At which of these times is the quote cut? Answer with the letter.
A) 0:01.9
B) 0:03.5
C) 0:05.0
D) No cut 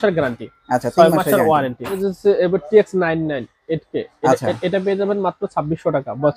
A